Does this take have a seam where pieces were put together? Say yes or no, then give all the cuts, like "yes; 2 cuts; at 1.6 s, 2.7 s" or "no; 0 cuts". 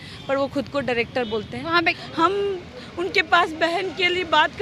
yes; 1 cut; at 2.0 s